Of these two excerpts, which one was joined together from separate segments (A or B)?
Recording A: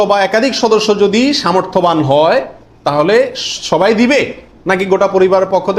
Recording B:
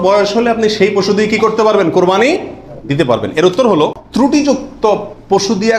B